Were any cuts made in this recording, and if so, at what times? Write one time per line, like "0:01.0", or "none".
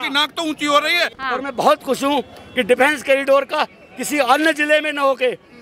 0:01.1